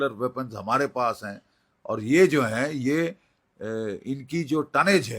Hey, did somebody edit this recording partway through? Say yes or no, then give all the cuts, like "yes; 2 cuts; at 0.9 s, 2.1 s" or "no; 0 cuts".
no; 0 cuts